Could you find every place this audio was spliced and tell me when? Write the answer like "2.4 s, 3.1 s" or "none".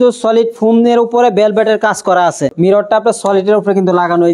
2.5 s

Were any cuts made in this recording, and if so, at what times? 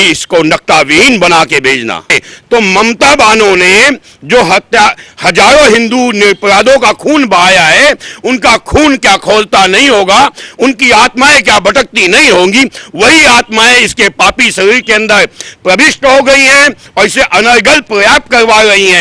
2.2 s

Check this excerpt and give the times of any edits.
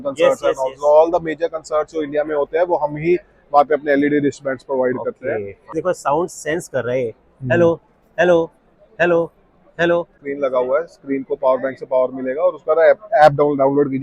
5.7 s, 10.2 s

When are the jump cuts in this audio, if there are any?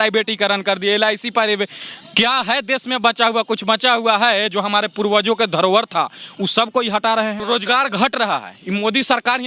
7.4 s

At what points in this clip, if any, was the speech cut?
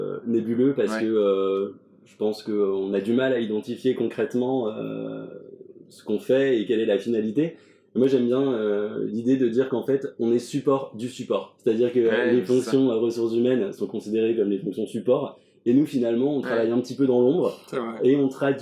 none

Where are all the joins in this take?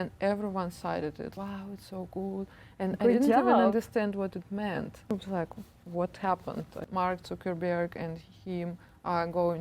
1.3 s, 5.1 s, 6.8 s

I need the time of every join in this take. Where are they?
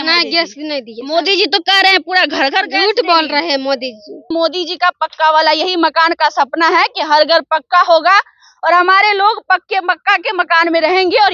0.9 s, 4.3 s

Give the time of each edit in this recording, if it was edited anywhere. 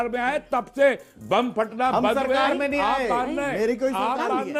none

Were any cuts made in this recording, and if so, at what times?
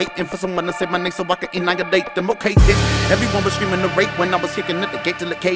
none

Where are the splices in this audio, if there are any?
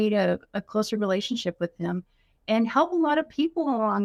none

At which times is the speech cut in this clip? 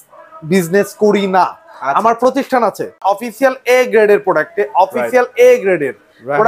3.0 s

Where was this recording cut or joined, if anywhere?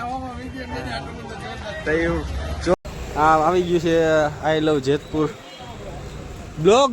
2.7 s

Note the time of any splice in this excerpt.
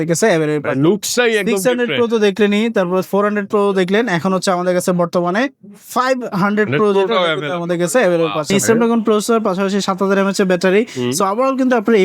8.5 s

